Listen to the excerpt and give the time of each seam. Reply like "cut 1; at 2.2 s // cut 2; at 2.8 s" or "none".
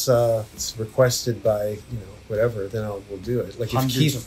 none